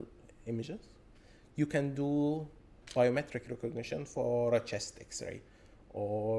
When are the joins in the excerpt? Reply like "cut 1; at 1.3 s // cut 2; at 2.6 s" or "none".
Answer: cut 1; at 2.8 s